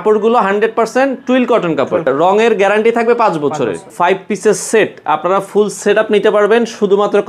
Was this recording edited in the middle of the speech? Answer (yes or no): yes